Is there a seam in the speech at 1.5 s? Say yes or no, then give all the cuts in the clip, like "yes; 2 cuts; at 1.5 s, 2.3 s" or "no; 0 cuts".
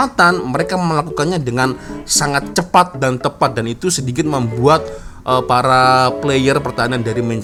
no; 0 cuts